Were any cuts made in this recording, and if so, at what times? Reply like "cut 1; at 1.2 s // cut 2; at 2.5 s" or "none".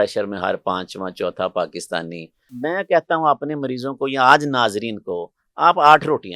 cut 1; at 2.5 s